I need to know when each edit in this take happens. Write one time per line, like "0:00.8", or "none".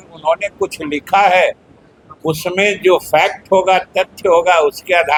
none

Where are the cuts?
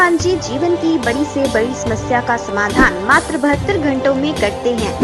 none

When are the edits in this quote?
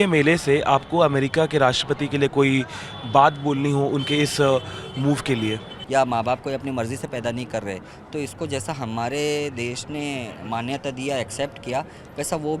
0:05.7

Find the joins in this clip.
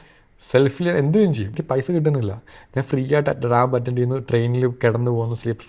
0:01.5

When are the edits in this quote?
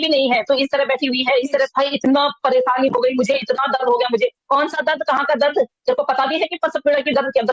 0:01.7

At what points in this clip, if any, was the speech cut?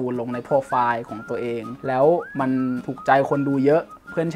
0:01.7
0:02.5

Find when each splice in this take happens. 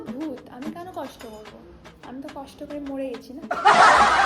0:03.3

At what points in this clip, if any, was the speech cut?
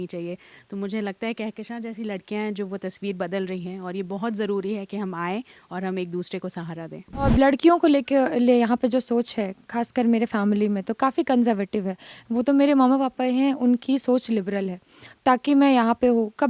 0:07.3

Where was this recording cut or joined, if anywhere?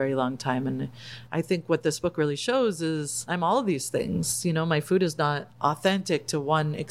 0:03.2
0:05.5

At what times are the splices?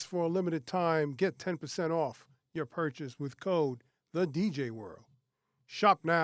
none

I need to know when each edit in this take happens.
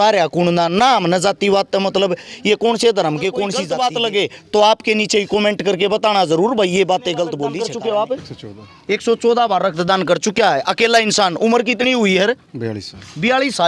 0:03.6
0:07.5

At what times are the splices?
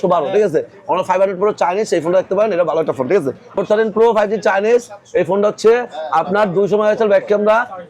0:03.6

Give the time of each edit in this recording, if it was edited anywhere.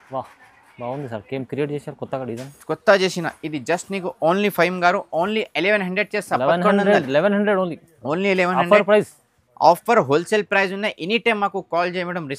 none

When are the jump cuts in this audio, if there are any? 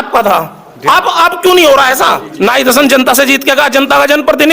0:02.2

